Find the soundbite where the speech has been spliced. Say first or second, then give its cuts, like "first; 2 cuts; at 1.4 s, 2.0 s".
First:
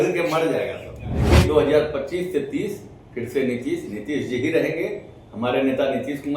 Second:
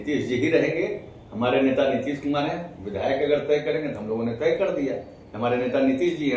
first; 1 cut; at 1.3 s